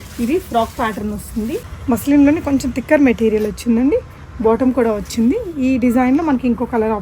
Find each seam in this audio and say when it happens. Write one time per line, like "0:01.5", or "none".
0:01.7